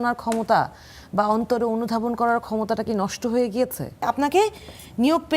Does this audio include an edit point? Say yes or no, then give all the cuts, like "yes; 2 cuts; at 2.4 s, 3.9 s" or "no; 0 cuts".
yes; 1 cut; at 4.0 s